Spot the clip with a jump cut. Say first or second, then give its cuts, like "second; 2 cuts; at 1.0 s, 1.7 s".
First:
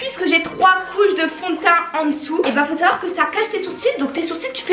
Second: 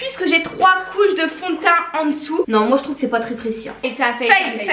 second; 1 cut; at 2.4 s